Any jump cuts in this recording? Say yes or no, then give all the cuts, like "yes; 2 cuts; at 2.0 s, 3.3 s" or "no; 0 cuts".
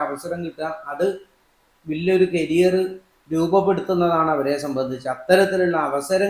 no; 0 cuts